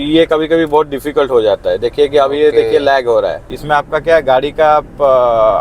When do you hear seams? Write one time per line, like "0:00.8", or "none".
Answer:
0:03.4